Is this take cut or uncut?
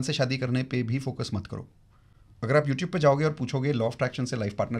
uncut